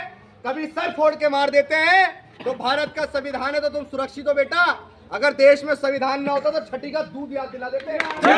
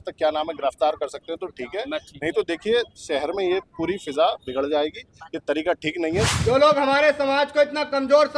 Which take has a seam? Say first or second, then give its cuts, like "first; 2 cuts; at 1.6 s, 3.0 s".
second; 1 cut; at 6.3 s